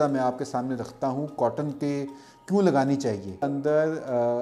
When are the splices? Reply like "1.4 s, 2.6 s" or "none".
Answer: 3.5 s